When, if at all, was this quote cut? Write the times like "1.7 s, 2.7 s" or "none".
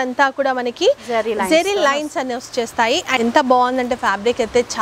3.1 s